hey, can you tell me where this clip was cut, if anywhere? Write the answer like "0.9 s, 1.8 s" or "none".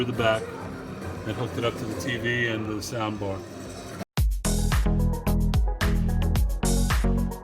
4.0 s